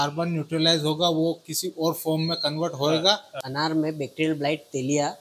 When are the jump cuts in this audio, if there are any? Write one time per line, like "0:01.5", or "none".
0:03.3